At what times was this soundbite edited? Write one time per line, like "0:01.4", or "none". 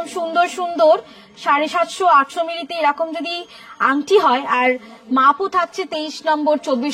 none

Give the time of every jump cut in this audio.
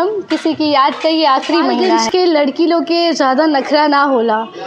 0:01.9

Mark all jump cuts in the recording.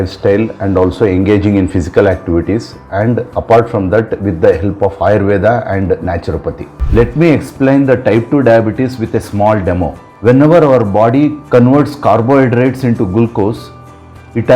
0:06.7

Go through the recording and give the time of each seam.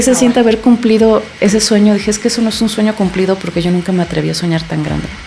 none

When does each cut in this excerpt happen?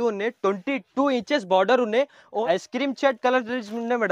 0:02.3

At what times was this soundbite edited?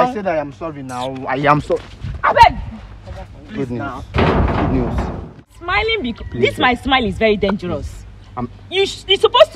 0:05.4

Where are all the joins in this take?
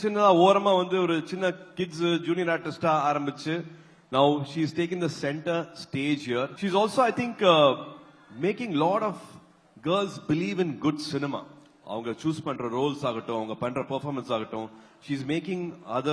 0:06.5

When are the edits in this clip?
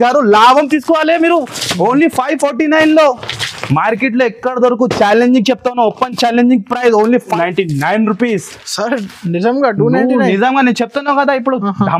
0:07.4

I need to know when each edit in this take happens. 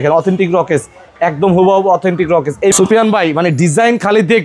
0:02.7

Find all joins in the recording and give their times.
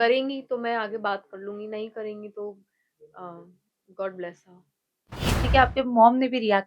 0:05.4

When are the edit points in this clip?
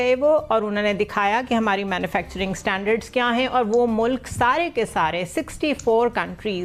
none

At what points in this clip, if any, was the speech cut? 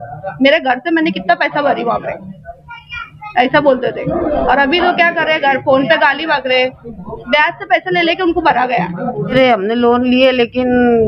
0:09.3

